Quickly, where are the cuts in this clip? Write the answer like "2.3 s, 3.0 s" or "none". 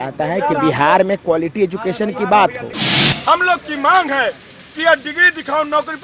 3.1 s